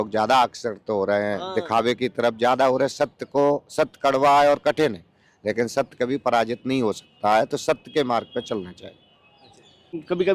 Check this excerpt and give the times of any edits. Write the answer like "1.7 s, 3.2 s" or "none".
none